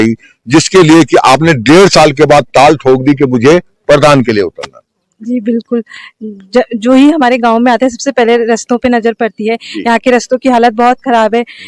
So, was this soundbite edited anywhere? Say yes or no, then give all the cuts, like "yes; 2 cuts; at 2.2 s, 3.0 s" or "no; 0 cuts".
no; 0 cuts